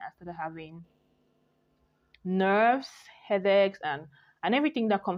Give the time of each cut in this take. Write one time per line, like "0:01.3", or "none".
none